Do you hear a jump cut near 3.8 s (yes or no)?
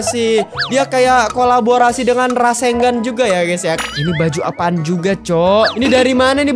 yes